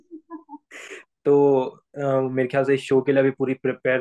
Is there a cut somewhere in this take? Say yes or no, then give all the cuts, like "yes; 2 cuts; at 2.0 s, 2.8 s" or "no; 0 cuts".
yes; 1 cut; at 1.0 s